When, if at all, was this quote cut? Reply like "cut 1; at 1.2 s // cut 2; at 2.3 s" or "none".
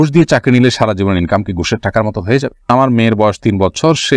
cut 1; at 2.7 s